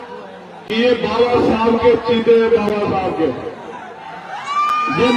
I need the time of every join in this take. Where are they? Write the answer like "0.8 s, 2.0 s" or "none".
none